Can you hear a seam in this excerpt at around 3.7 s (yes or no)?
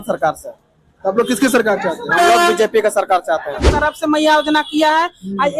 yes